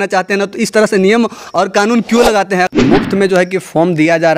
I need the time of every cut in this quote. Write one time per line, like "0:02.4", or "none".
0:02.7